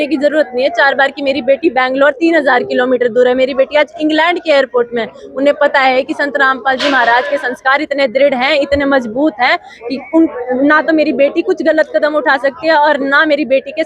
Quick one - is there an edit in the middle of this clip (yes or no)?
no